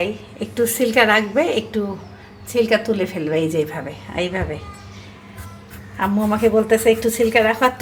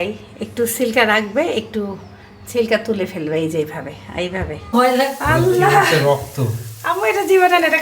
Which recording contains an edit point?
second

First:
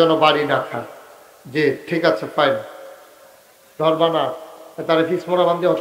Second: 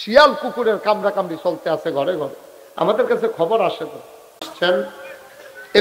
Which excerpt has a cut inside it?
second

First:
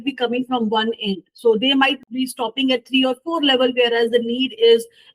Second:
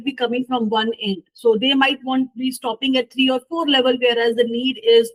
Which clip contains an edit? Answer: first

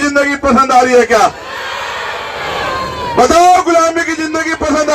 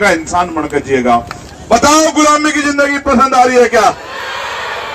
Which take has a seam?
second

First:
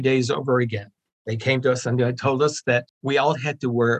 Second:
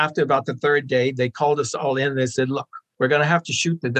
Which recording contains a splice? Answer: first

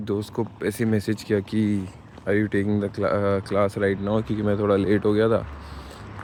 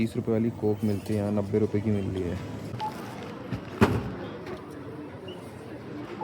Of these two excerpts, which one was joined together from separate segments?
second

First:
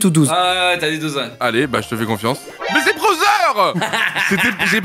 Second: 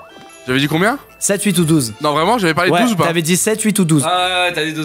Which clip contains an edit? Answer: first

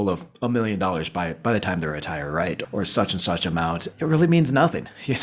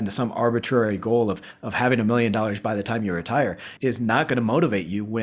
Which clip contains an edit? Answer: first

